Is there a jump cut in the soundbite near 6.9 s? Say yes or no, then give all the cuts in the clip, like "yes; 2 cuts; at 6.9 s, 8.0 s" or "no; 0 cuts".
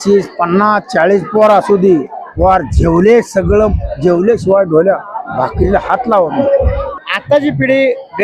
yes; 1 cut; at 6.9 s